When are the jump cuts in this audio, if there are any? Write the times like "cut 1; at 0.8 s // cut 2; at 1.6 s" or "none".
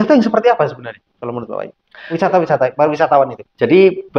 none